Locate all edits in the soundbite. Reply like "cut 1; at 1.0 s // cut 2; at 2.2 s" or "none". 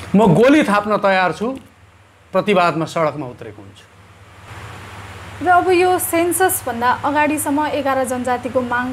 cut 1; at 4.5 s

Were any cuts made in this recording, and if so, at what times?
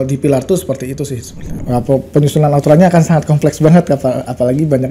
cut 1; at 1.5 s

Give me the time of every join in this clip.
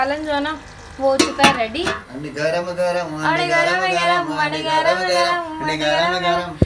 cut 1; at 2.1 s

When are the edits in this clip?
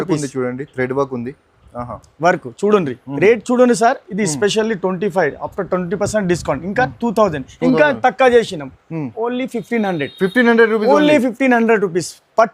none

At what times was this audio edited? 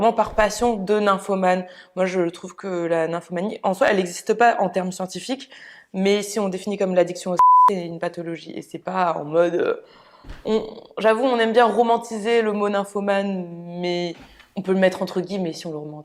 none

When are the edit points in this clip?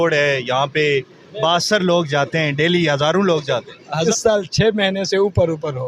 cut 1; at 4.1 s

